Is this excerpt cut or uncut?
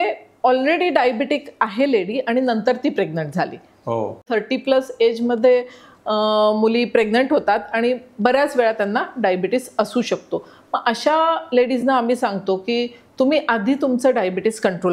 cut